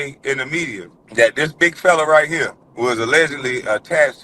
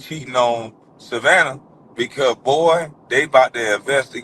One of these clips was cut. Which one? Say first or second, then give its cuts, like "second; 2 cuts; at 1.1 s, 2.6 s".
first; 2 cuts; at 0.9 s, 2.6 s